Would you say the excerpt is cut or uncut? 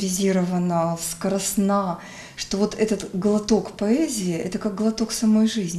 uncut